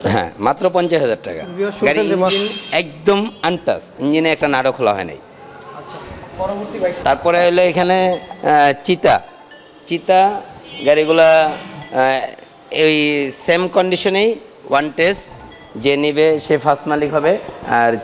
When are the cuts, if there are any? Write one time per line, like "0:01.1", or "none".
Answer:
none